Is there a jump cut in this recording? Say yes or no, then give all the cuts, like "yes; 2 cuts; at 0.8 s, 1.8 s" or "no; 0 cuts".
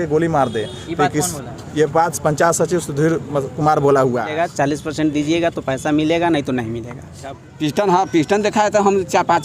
yes; 2 cuts; at 4.3 s, 7.5 s